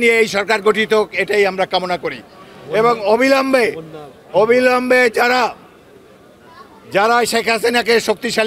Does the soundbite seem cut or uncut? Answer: uncut